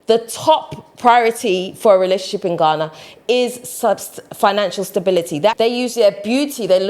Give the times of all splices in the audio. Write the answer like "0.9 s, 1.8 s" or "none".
5.5 s